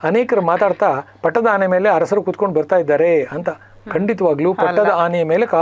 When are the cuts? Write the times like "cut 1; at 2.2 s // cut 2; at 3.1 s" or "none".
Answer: none